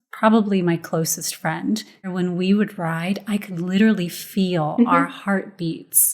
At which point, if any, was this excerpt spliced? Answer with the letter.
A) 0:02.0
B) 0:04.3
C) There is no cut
A